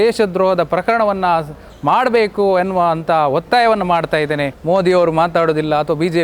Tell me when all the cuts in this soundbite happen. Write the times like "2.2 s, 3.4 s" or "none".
4.5 s

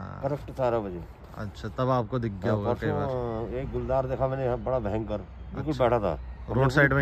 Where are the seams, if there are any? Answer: none

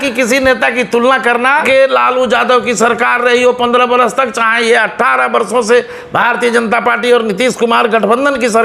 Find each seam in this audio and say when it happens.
1.6 s

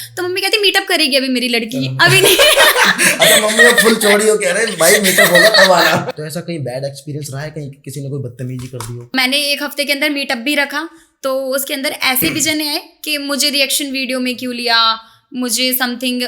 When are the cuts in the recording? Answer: 6.1 s, 9.1 s

